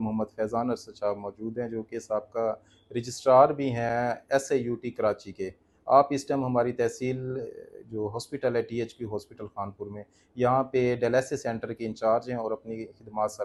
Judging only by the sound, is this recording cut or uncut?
uncut